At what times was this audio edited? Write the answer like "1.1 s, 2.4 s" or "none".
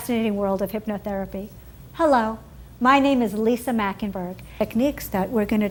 none